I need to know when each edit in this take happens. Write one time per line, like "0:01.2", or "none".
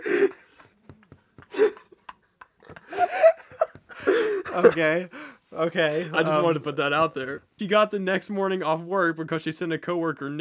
0:07.6